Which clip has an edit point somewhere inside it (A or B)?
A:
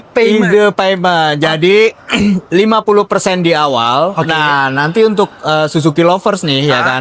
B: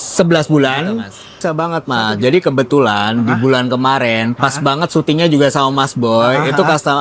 B